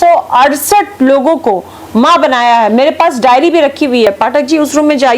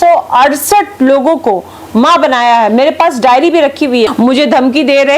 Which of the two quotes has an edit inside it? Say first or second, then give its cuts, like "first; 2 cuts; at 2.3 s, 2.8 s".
second; 1 cut; at 4.1 s